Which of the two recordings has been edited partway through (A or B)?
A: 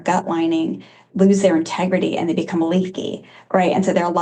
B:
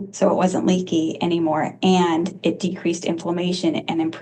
A